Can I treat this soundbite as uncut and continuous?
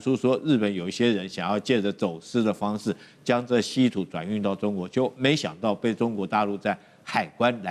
yes; 0 cuts

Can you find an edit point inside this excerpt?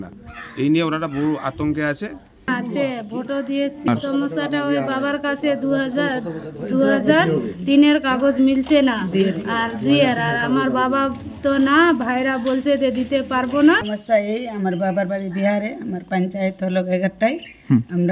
yes; 3 cuts; at 2.5 s, 3.9 s, 13.9 s

